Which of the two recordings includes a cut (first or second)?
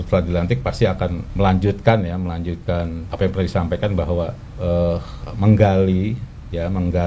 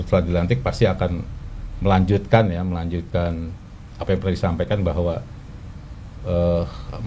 first